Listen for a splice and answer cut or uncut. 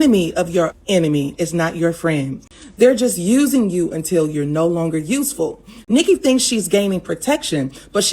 cut